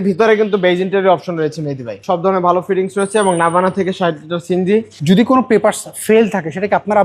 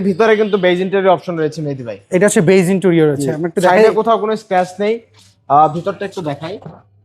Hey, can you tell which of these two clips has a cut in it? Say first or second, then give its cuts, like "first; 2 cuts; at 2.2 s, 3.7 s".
first; 2 cuts; at 2.0 s, 4.9 s